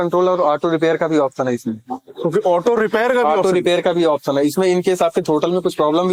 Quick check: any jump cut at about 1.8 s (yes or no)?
no